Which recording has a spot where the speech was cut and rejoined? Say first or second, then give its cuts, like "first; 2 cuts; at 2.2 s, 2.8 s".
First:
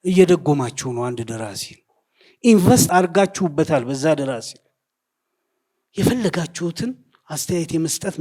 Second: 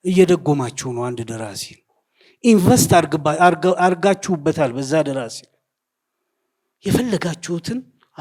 first; 1 cut; at 2.9 s